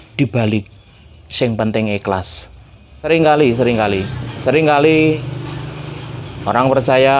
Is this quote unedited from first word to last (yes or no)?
no